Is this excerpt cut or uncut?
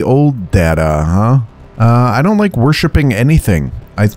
cut